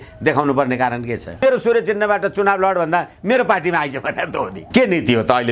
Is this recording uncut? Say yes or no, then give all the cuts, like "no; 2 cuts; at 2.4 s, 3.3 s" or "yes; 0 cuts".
no; 2 cuts; at 1.4 s, 4.6 s